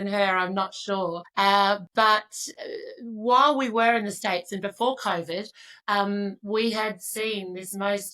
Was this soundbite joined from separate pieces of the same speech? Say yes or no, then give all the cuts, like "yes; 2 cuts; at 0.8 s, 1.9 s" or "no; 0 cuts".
yes; 1 cut; at 1.2 s